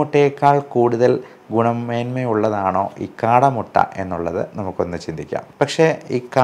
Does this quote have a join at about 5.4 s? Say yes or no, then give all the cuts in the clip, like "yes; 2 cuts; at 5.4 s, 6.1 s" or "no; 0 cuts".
yes; 1 cut; at 5.4 s